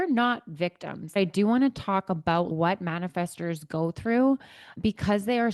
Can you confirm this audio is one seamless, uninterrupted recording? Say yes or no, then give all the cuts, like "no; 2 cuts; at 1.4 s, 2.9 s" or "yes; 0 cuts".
no; 1 cut; at 1.1 s